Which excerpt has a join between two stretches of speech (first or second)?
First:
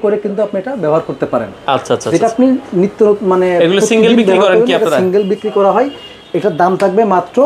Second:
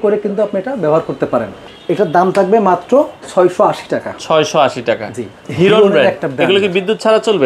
second